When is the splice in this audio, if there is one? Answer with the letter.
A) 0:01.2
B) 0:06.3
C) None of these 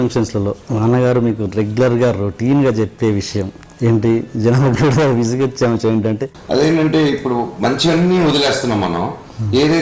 B